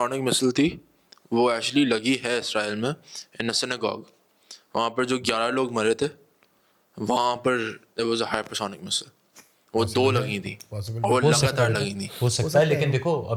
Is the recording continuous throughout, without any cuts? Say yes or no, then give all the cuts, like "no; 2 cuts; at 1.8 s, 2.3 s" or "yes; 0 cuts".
yes; 0 cuts